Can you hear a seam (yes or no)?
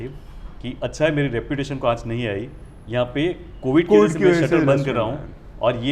no